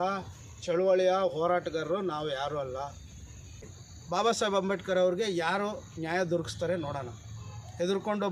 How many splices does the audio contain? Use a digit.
1